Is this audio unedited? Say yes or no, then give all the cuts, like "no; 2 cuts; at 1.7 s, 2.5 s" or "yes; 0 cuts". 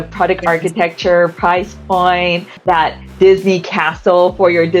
no; 1 cut; at 2.5 s